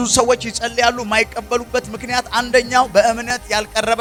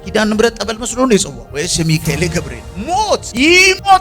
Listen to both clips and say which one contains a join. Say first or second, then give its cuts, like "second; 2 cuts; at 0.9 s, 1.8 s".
second; 2 cuts; at 1.4 s, 3.1 s